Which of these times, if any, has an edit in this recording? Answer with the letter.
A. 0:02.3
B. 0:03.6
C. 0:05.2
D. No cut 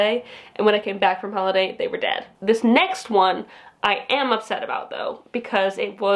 A